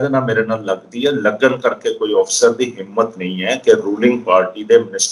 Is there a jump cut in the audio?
no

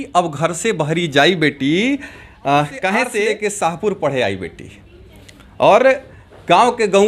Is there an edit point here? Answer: yes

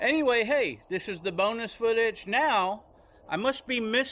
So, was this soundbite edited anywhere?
no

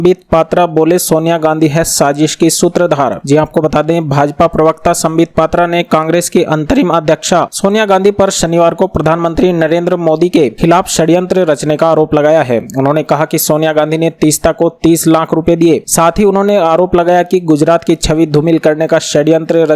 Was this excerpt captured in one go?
yes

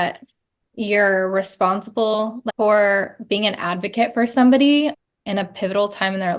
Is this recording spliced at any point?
yes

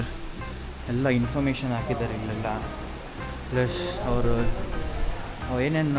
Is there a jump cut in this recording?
no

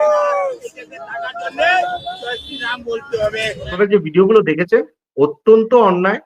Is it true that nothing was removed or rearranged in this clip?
no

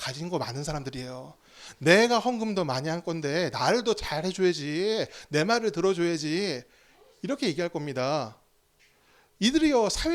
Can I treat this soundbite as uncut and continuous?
yes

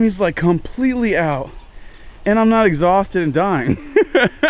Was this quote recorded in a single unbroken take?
yes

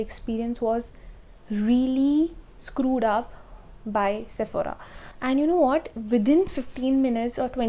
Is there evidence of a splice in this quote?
no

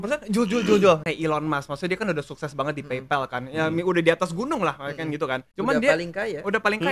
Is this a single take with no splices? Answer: no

